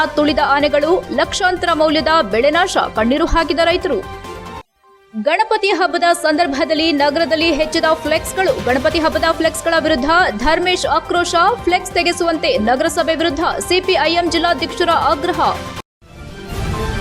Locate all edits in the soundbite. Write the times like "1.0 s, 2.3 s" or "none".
15.7 s

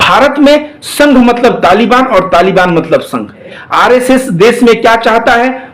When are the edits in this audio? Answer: 3.6 s

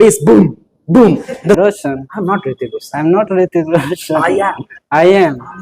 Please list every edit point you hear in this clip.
1.6 s

